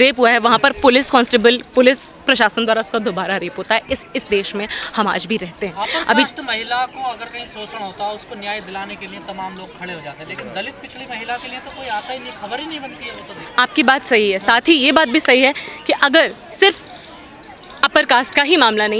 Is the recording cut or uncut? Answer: uncut